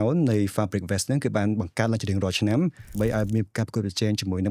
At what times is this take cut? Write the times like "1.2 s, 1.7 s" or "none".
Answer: 2.9 s